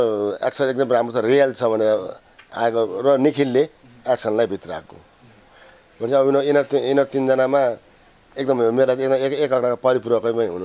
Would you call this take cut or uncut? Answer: uncut